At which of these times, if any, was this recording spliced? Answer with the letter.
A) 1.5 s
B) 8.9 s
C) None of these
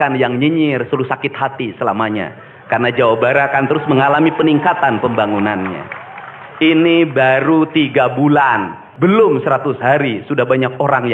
B